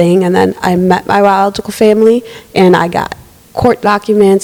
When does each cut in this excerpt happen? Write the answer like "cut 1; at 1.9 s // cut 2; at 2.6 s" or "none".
none